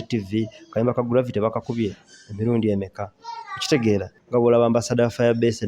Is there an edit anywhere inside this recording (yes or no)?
yes